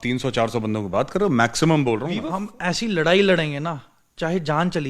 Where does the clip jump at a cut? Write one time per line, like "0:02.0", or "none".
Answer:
0:02.2